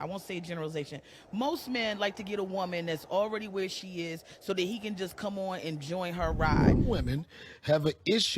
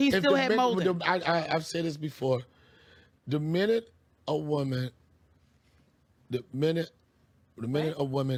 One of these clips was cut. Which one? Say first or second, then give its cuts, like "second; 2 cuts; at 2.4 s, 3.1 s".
first; 1 cut; at 6.3 s